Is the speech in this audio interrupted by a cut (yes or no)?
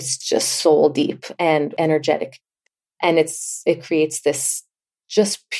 no